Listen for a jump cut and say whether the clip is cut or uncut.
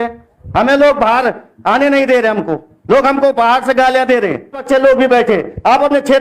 cut